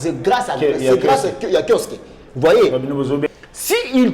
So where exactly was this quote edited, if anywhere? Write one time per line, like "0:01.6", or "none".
0:03.2